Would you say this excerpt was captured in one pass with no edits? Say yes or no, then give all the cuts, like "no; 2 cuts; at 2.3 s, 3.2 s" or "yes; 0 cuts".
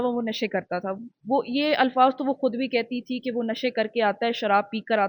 yes; 0 cuts